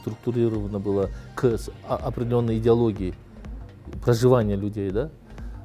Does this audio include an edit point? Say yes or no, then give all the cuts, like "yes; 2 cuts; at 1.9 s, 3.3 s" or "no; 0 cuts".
no; 0 cuts